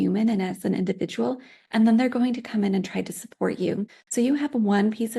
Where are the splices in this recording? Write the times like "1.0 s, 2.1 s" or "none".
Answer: 4.0 s